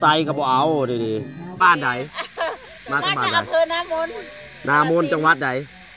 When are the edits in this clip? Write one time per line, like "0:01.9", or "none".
0:01.5